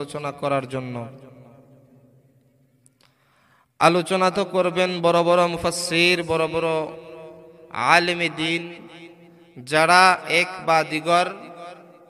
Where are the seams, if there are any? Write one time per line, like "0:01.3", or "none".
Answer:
none